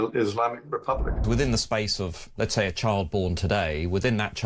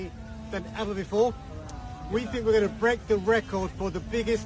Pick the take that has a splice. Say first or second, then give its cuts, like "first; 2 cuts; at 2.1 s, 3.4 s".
first; 1 cut; at 1.2 s